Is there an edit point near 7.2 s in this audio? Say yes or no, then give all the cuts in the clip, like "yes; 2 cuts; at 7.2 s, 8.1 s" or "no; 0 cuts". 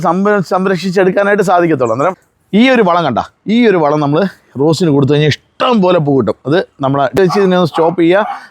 yes; 2 cuts; at 2.3 s, 7.2 s